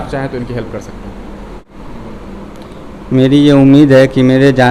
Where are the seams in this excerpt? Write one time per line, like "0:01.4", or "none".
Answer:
none